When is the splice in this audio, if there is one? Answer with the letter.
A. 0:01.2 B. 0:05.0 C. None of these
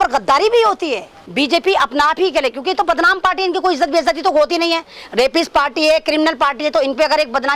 A